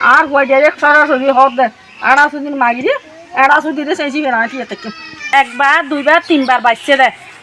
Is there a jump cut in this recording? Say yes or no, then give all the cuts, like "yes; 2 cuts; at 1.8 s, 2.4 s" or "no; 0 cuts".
yes; 1 cut; at 5.2 s